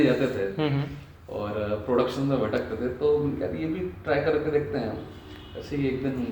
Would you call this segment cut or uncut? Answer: uncut